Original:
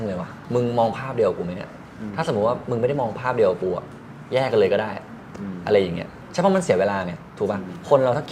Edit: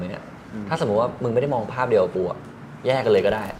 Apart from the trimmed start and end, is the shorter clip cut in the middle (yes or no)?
no